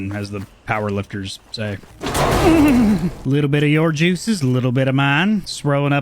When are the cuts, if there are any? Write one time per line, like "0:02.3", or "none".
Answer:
0:01.8
0:03.1